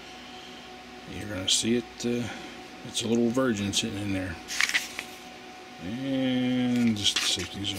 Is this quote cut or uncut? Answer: uncut